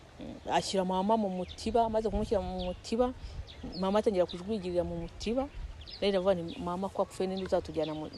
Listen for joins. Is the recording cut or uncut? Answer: uncut